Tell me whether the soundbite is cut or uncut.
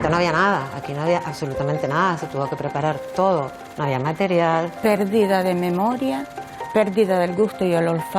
cut